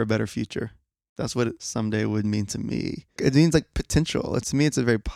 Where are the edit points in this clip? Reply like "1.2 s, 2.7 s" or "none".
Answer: 1.6 s, 3.0 s